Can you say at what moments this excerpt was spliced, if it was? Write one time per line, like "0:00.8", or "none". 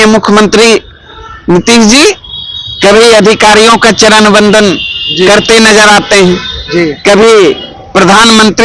none